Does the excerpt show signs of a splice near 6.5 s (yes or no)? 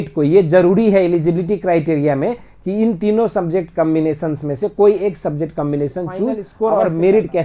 yes